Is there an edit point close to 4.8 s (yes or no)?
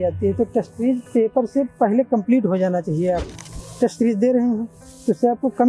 no